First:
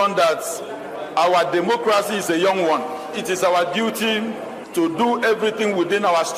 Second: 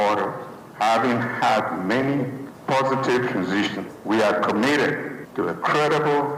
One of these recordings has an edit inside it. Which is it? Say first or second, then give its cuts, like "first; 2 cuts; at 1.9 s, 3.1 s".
first; 1 cut; at 4.5 s